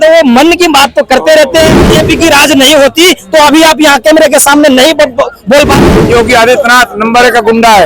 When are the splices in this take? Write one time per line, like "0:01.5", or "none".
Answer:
0:01.8
0:05.8